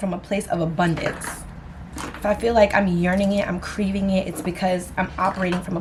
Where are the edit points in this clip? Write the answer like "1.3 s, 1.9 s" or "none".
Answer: none